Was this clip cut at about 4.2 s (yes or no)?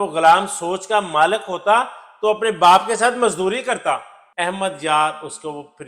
yes